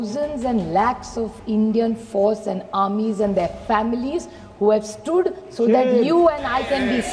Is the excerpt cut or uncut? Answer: uncut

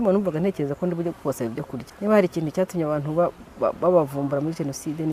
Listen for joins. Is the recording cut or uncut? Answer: cut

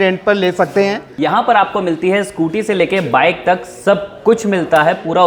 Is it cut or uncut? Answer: cut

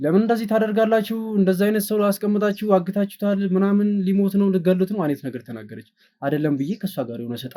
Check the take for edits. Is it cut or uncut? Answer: uncut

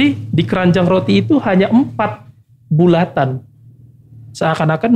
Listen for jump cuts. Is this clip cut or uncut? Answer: uncut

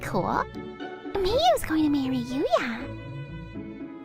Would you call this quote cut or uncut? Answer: cut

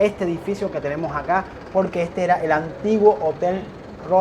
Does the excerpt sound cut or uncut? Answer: uncut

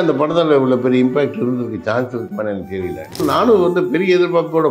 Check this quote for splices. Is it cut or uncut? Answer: cut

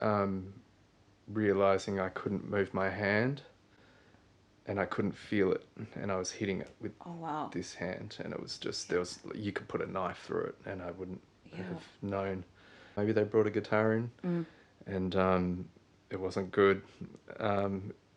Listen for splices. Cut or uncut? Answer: cut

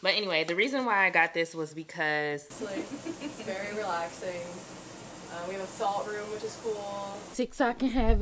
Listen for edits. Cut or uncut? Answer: cut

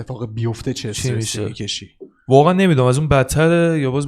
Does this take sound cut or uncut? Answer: uncut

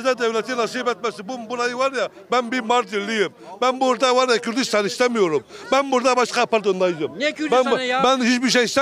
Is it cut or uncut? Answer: uncut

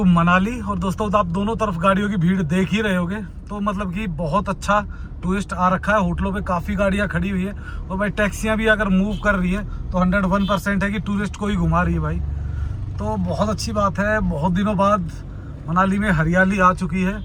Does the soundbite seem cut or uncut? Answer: uncut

